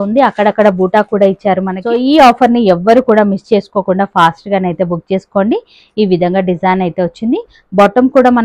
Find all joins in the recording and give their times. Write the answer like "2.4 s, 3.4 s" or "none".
1.8 s